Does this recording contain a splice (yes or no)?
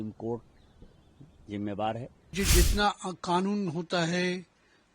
yes